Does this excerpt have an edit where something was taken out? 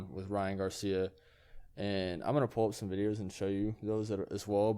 no; 0 cuts

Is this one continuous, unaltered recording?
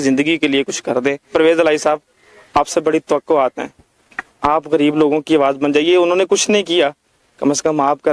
yes; 0 cuts

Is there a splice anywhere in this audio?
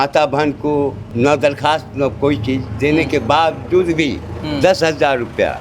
yes; 1 cut; at 1.0 s

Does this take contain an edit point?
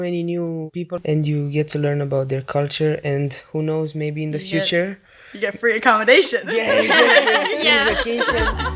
yes; 1 cut; at 0.9 s

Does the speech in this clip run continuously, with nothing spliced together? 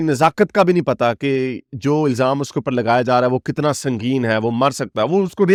yes; 0 cuts

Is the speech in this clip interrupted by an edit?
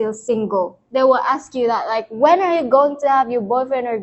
no; 0 cuts

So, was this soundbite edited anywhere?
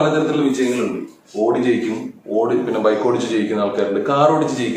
no; 0 cuts

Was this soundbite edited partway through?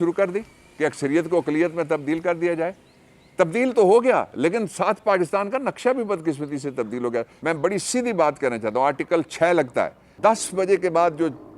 yes; 2 cuts; at 7.3 s, 10.0 s

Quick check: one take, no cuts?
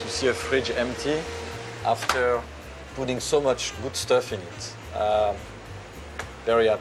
yes; 0 cuts

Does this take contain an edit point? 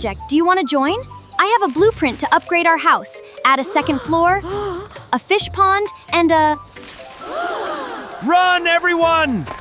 yes; 2 cuts; at 6.7 s, 8.1 s

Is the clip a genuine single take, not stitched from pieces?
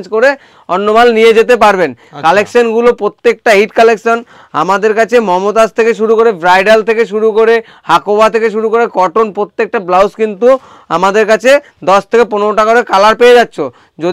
yes; 0 cuts

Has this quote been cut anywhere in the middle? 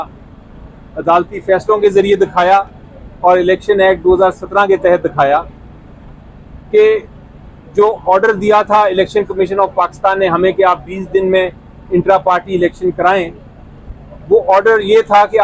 no; 0 cuts

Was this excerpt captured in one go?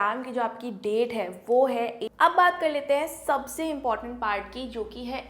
no; 1 cut; at 2.0 s

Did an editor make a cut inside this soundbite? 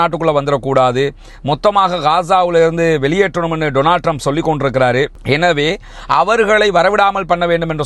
no; 0 cuts

